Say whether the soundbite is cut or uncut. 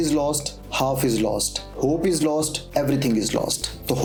uncut